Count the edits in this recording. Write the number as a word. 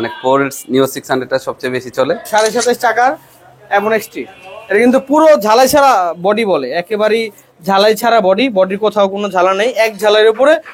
one